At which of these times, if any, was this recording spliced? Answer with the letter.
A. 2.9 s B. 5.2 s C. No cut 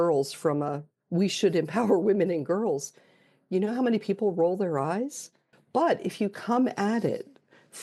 B